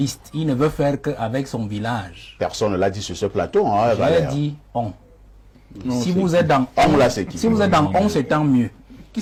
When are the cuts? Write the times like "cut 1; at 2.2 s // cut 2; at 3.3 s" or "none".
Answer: none